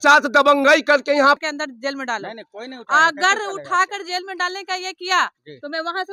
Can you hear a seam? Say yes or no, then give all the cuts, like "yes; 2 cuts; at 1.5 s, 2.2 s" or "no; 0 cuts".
yes; 1 cut; at 1.4 s